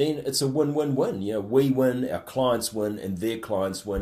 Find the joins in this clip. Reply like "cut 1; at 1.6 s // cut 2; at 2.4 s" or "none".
none